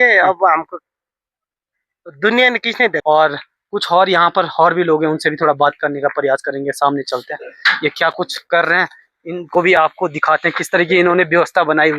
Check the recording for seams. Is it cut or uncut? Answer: cut